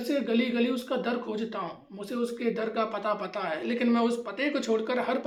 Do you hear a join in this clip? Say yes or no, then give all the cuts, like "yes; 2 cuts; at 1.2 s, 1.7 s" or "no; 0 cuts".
no; 0 cuts